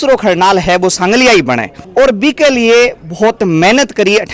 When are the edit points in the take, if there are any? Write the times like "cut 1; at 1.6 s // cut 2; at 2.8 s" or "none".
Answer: none